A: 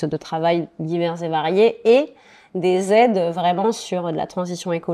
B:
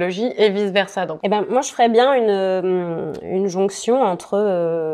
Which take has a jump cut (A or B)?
B